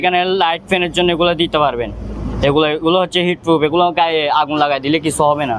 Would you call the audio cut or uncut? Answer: uncut